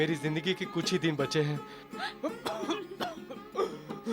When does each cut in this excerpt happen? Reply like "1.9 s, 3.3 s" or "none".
none